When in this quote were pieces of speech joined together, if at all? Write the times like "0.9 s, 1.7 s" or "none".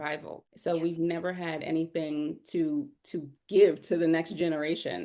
none